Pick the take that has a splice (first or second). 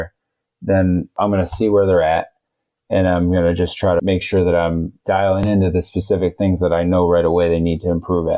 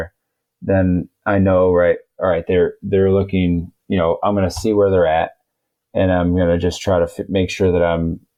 first